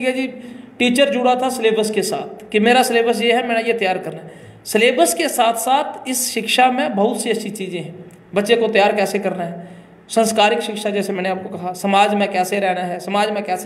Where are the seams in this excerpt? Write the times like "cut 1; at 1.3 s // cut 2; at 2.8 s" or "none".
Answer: none